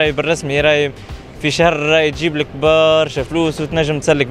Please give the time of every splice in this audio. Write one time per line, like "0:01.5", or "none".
none